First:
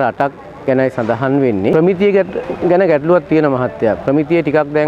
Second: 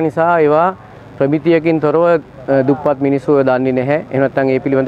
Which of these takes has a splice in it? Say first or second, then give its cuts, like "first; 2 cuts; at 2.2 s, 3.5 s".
first; 1 cut; at 1.7 s